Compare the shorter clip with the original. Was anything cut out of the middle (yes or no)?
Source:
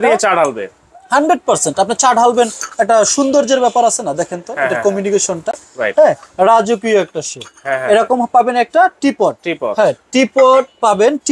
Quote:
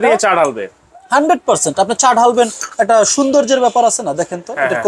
no